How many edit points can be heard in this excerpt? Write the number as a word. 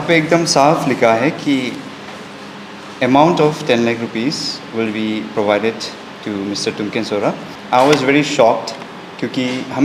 one